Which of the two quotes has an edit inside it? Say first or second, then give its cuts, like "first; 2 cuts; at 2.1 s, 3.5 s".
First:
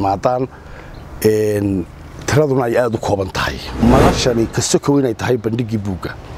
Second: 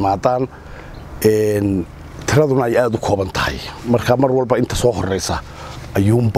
first; 1 cut; at 3.7 s